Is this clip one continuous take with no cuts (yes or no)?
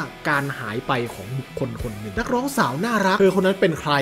no